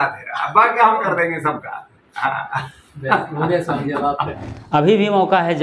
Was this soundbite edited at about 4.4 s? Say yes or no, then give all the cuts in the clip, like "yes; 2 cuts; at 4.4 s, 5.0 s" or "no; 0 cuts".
yes; 1 cut; at 4.4 s